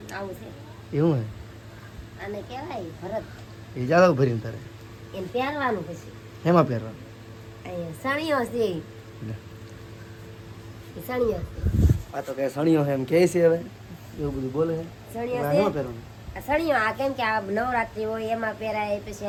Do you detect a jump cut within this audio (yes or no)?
no